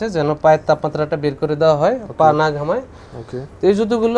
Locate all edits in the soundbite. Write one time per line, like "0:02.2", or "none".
none

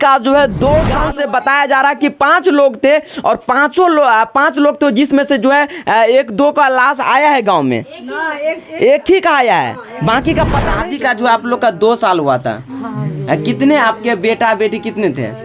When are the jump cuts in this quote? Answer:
0:01.0
0:10.7

